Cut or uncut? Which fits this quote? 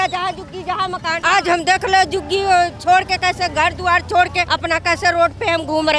cut